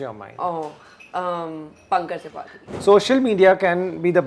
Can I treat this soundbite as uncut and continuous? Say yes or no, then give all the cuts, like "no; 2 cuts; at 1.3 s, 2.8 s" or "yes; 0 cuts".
no; 1 cut; at 2.7 s